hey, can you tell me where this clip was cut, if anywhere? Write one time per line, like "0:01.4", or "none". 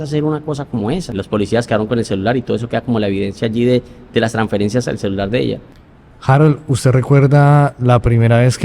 0:01.1
0:05.8